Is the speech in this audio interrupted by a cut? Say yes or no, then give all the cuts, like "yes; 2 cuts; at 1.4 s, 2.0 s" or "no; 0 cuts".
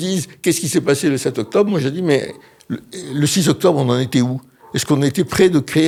no; 0 cuts